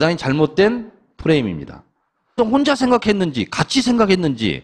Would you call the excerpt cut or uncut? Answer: uncut